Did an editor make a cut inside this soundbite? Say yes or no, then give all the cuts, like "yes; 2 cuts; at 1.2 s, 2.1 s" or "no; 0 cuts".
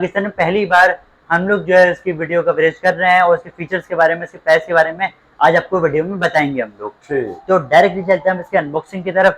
no; 0 cuts